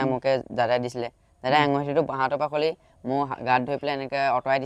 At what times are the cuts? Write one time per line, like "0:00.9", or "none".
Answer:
none